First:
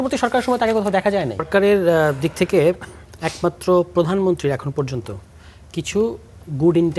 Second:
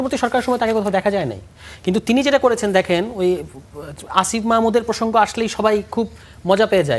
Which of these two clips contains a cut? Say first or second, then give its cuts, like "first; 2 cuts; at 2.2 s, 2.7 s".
first; 1 cut; at 1.5 s